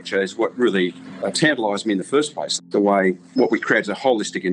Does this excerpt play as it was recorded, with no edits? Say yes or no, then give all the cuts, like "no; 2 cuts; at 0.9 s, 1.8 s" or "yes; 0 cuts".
no; 2 cuts; at 2.5 s, 3.3 s